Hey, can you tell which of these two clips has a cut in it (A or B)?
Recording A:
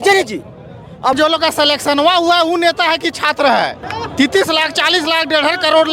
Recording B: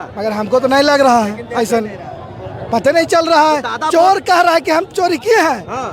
A